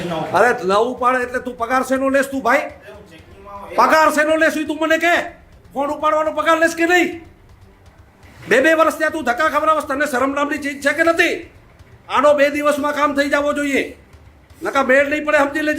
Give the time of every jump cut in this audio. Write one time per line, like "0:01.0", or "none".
none